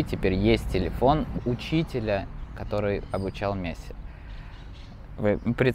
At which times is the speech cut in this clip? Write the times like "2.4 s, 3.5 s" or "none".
1.4 s